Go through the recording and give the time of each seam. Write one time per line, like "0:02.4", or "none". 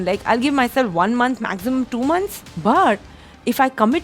0:02.4